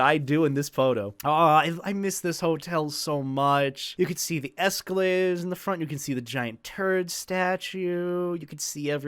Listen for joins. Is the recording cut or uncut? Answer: cut